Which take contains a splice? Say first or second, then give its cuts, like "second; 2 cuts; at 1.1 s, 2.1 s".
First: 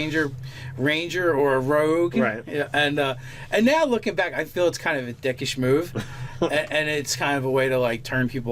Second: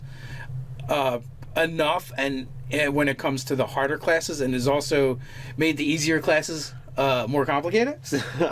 first; 1 cut; at 2.4 s